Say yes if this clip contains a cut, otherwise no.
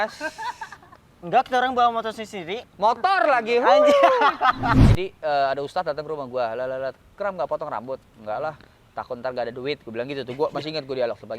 yes